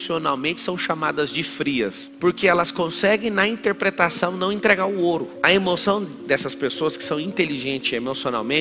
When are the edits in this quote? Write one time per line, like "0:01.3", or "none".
0:02.1